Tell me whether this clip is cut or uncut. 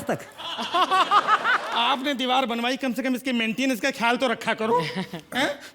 cut